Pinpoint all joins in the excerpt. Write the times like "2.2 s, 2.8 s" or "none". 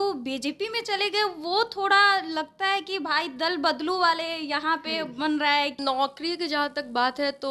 5.8 s